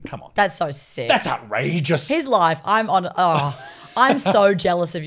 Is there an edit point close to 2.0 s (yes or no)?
yes